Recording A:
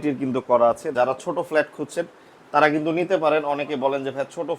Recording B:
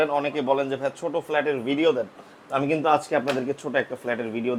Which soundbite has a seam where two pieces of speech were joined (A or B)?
A